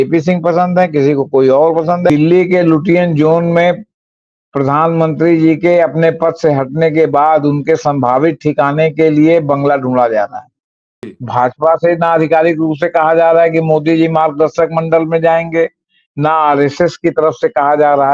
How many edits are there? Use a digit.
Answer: 2